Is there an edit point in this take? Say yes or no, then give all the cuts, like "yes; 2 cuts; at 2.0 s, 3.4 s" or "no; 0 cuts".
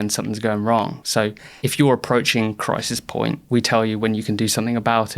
yes; 2 cuts; at 1.1 s, 3.4 s